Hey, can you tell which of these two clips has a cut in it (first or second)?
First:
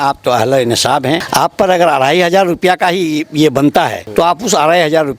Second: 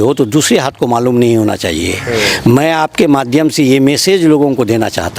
first